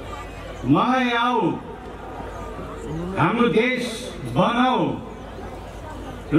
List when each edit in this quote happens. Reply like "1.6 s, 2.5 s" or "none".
none

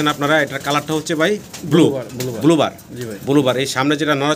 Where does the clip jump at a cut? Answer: none

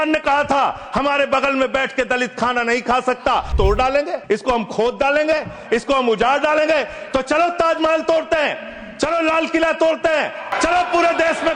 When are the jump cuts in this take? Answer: 3.8 s, 10.5 s

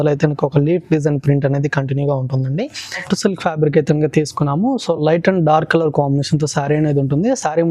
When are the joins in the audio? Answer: 3.0 s

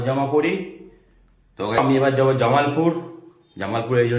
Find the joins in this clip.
1.8 s

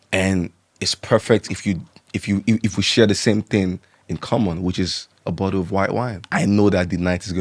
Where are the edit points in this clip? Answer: 6.2 s

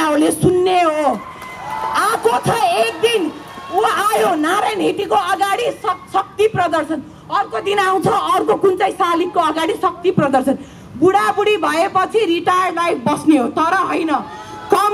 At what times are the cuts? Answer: none

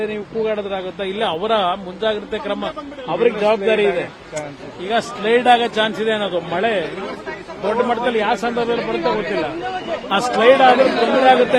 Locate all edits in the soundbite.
none

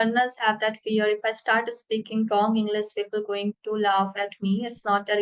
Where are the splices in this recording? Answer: none

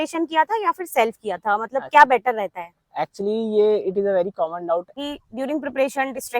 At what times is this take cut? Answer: 4.9 s

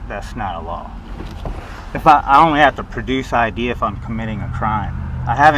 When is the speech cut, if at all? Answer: none

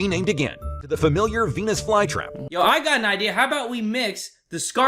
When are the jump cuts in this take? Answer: 1.0 s, 2.4 s

